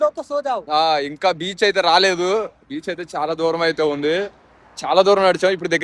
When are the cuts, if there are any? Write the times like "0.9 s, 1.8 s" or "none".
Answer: none